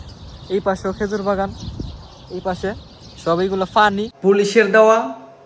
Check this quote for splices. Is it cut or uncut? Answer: cut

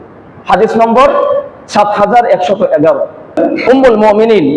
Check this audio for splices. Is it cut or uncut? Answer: cut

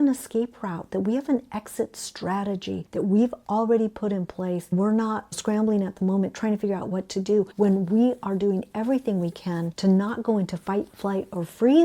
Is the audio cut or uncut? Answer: cut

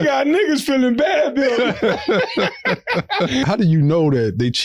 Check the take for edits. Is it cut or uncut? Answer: cut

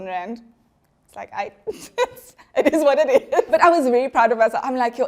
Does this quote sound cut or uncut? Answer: cut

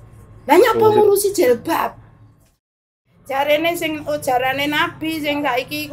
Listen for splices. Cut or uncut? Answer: cut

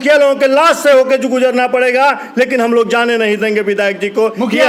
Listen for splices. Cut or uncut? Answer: uncut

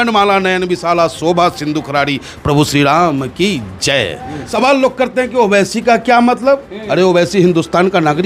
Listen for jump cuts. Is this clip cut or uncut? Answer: cut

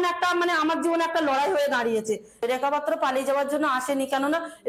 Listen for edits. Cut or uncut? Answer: cut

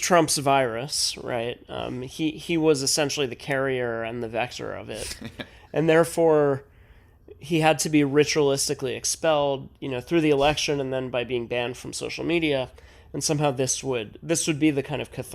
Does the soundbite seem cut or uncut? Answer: uncut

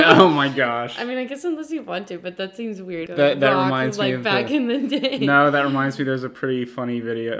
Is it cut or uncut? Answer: cut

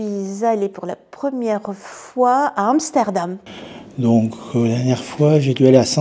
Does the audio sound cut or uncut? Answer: cut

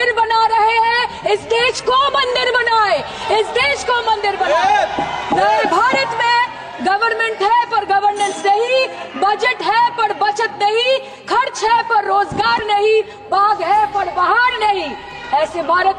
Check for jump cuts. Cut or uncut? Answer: uncut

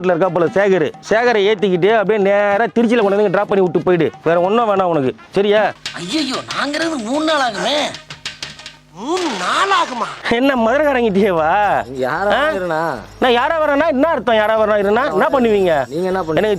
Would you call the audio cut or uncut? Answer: cut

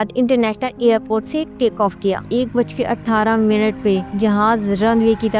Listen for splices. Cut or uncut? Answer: cut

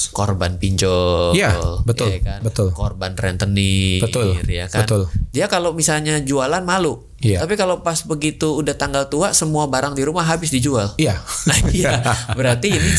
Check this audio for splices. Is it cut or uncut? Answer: uncut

